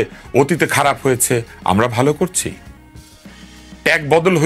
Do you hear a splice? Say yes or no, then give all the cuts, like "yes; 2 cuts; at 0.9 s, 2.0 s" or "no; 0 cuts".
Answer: no; 0 cuts